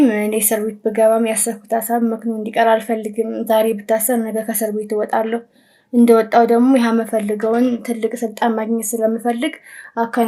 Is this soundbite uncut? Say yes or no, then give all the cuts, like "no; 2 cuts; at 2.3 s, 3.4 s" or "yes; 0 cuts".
yes; 0 cuts